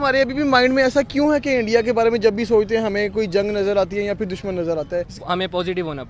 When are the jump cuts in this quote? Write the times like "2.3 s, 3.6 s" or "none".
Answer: 5.1 s